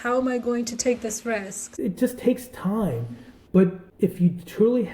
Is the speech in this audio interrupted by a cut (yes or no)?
yes